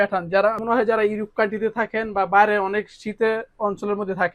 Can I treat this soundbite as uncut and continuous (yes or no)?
yes